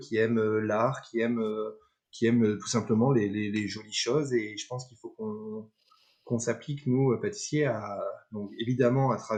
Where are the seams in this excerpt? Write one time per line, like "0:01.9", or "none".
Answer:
none